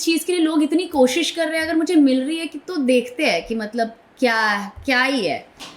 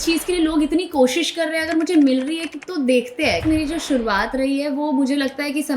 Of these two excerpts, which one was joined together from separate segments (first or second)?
second